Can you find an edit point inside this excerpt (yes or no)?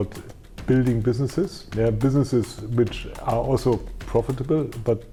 no